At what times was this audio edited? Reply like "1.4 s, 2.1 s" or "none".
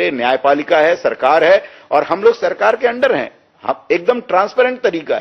none